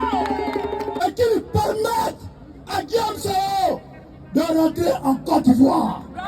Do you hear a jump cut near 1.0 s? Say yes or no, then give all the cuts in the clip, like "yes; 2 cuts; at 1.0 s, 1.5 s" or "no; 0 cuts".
yes; 1 cut; at 1.0 s